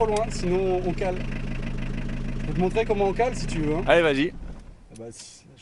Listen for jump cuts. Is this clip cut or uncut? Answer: uncut